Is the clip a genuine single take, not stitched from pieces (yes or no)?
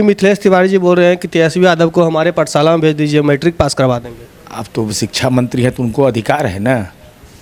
yes